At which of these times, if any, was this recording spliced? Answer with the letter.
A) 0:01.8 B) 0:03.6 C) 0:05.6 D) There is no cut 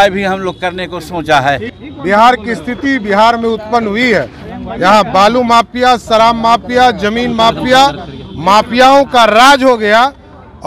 A